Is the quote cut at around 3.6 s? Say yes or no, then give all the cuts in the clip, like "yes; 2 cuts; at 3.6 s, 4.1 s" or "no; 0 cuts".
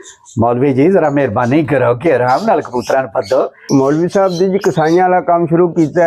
yes; 1 cut; at 3.6 s